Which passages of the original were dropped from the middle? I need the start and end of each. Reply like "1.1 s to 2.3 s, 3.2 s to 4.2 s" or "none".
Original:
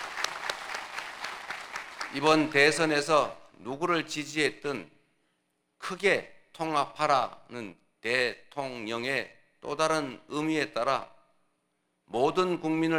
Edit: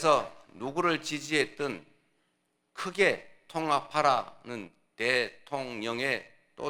none